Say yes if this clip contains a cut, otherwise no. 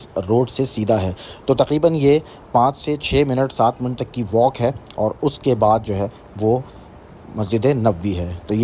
no